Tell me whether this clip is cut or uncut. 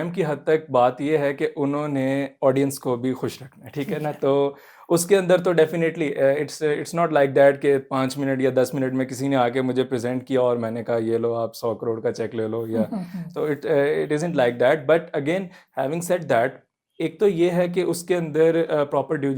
uncut